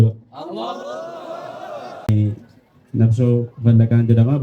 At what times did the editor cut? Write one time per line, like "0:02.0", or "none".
0:02.1